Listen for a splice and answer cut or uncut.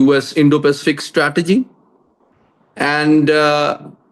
uncut